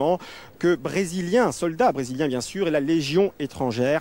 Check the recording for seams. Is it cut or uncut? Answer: uncut